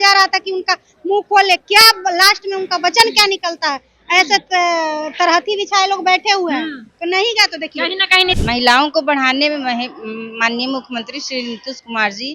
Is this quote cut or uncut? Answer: cut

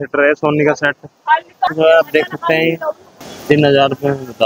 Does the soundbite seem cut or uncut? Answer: cut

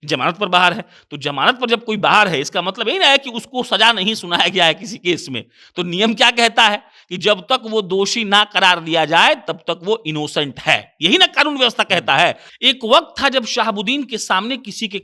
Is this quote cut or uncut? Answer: cut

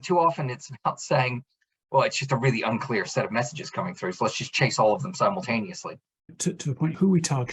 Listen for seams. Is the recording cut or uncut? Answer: cut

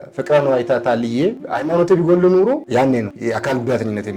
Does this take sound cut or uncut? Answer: uncut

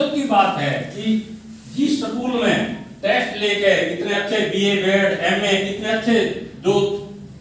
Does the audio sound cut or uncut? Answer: uncut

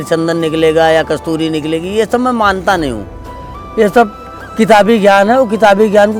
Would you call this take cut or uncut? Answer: uncut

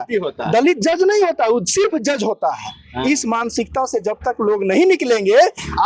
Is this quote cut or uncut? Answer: uncut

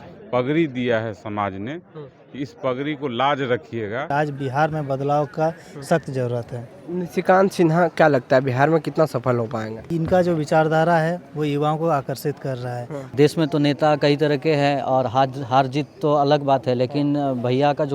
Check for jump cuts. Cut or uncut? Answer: cut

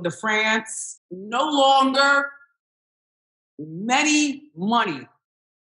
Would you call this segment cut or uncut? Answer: cut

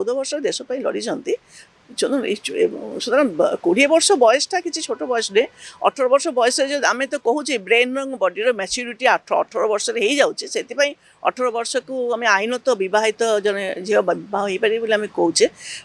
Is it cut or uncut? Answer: uncut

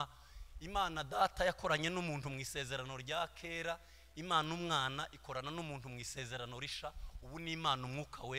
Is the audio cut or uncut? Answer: uncut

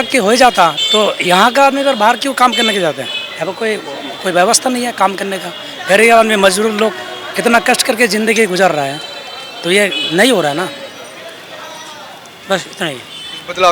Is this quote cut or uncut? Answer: uncut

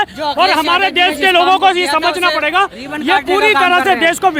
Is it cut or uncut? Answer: uncut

